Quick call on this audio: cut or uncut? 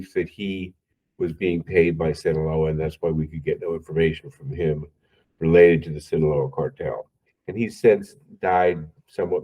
uncut